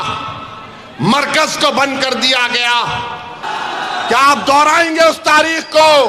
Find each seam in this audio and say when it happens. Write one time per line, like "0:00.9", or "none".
0:03.4